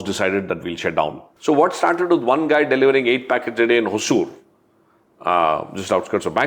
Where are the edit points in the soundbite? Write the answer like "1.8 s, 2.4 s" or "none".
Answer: 1.2 s